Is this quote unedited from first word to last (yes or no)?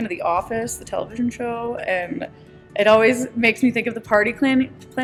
yes